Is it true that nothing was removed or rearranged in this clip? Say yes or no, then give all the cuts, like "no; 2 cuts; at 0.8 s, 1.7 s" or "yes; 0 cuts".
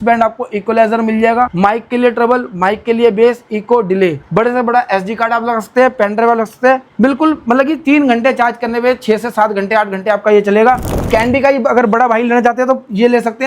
no; 4 cuts; at 1.5 s, 4.2 s, 6.9 s, 11.0 s